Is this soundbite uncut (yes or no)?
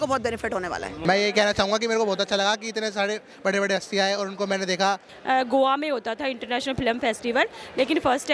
no